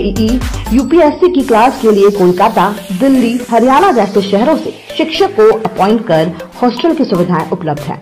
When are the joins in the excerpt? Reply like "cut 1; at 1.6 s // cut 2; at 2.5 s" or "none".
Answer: none